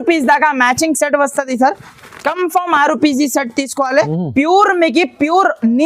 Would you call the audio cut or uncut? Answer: cut